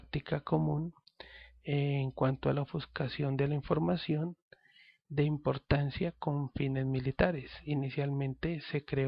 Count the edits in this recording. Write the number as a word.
one